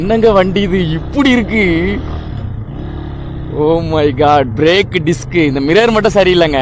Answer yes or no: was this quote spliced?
no